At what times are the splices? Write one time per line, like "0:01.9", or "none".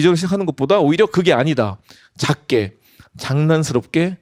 none